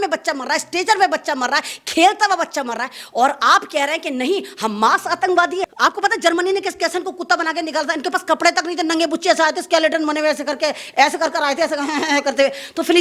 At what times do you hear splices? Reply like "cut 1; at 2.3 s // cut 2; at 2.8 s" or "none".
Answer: cut 1; at 5.7 s